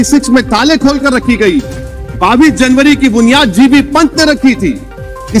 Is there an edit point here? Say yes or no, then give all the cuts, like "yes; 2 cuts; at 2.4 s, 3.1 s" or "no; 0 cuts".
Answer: no; 0 cuts